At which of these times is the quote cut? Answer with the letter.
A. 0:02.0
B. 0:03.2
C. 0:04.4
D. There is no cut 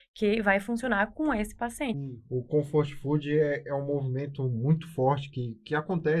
A